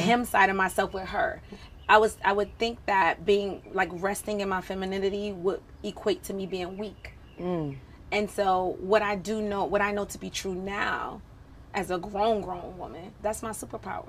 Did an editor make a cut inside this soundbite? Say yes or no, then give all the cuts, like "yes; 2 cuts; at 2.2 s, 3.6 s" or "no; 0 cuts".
yes; 1 cut; at 9.9 s